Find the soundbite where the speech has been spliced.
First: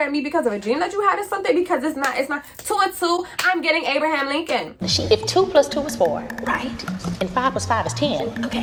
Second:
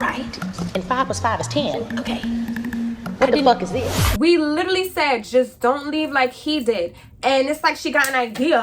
second; 1 cut; at 4.1 s

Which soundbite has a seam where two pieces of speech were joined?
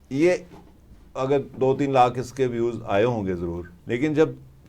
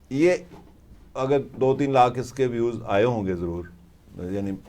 first; 1 cut; at 3.7 s

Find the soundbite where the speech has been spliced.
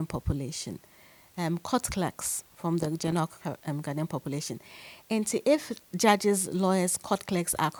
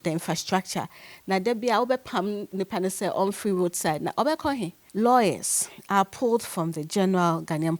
second; 1 cut; at 4.8 s

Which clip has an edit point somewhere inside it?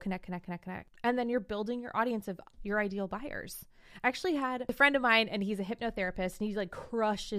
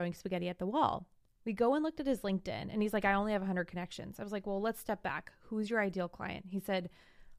first; 2 cuts; at 1.0 s, 4.7 s

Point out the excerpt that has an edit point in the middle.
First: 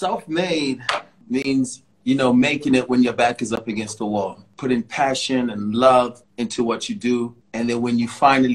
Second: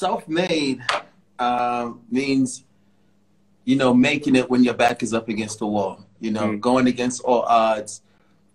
first; 5 cuts; at 1.2 s, 1.9 s, 4.5 s, 6.2 s, 7.4 s

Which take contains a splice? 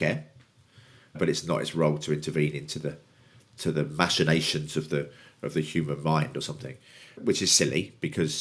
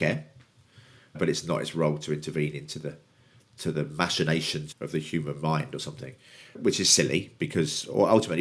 second; 1 cut; at 4.6 s

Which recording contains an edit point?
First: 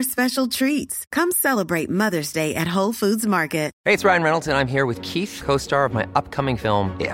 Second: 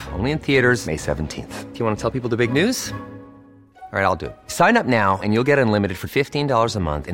first; 1 cut; at 3.7 s

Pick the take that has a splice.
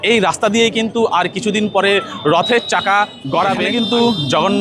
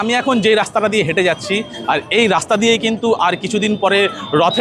first; 1 cut; at 3.6 s

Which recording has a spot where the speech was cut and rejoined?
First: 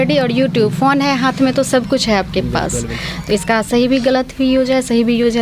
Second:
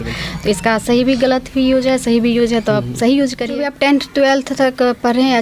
second; 1 cut; at 3.7 s

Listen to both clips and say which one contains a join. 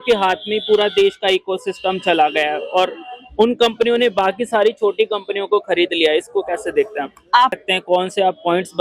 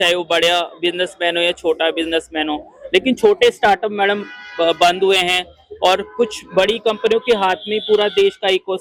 first; 1 cut; at 7.5 s

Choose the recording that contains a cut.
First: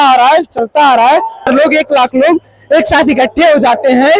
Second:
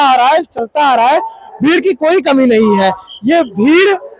first; 1 cut; at 1.5 s

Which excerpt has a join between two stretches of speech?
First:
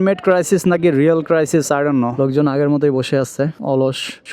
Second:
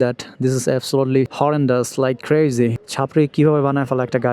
first; 1 cut; at 2.1 s

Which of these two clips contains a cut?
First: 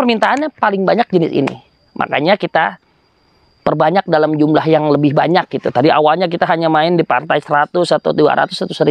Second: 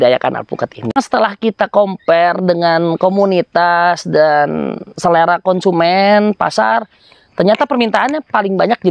second; 1 cut; at 1.0 s

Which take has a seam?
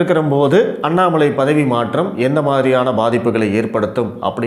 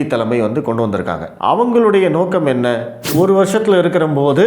second; 2 cuts; at 1.3 s, 3.0 s

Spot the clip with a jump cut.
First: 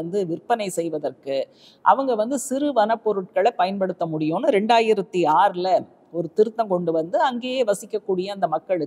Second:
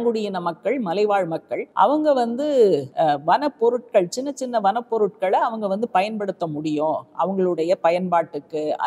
second; 2 cuts; at 1.6 s, 2.9 s

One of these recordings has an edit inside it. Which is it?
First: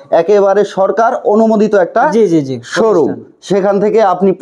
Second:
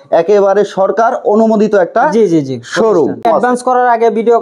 second; 1 cut; at 3.2 s

